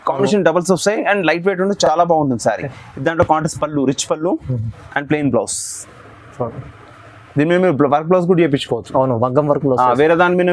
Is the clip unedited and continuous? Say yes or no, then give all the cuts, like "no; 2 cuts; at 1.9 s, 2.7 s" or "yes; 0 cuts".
yes; 0 cuts